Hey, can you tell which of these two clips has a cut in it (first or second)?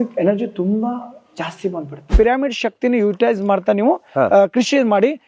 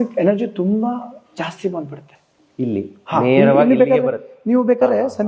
first